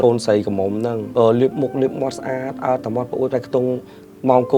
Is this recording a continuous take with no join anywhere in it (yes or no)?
no